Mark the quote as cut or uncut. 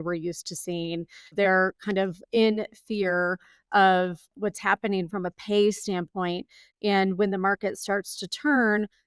cut